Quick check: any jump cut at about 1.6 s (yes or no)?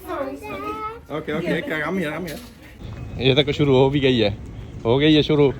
no